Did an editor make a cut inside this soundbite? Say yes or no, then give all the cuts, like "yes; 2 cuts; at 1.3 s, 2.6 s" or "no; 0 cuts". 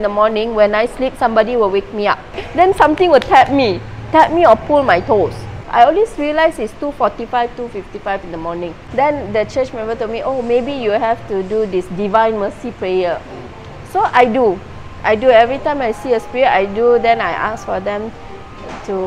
yes; 3 cuts; at 2.4 s, 5.6 s, 8.8 s